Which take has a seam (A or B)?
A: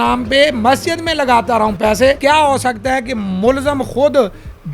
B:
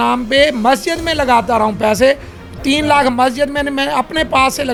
A